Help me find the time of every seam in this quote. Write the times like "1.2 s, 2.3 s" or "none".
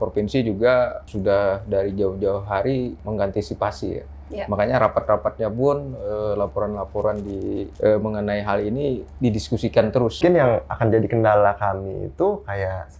1.1 s, 3.0 s, 7.7 s, 10.2 s

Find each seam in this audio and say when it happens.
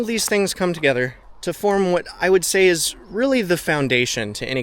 1.3 s

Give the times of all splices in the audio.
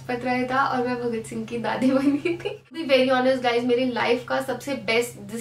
2.8 s

